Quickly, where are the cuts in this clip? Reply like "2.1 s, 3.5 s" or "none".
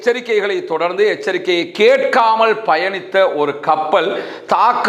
none